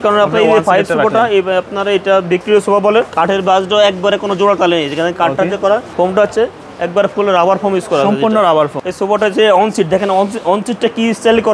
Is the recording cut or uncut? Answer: cut